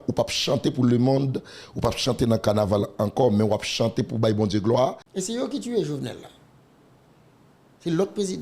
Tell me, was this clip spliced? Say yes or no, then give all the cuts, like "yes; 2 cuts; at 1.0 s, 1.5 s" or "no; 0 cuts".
yes; 1 cut; at 5.1 s